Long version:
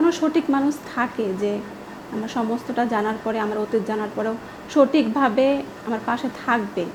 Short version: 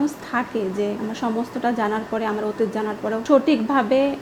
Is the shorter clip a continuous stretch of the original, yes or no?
no